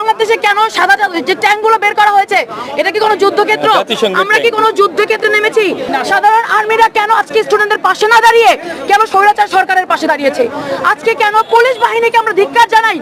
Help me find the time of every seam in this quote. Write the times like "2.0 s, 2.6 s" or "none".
5.8 s